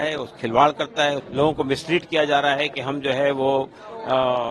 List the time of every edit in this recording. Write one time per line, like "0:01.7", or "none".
0:01.2